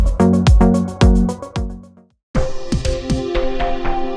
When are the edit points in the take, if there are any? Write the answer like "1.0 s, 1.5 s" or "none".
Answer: 2.3 s